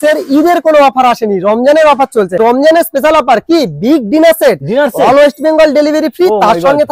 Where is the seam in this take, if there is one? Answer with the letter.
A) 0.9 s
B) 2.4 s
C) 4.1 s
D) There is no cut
B